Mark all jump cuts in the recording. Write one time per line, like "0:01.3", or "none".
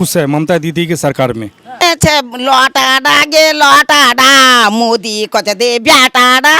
0:01.8